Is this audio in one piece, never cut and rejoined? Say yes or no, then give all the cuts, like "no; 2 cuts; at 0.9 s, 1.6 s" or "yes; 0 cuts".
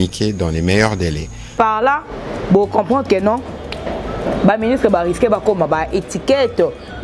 no; 1 cut; at 1.5 s